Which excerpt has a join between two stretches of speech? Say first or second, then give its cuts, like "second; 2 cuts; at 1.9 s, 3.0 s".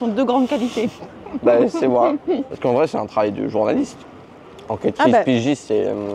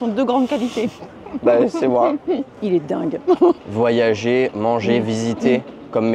second; 2 cuts; at 2.5 s, 3.7 s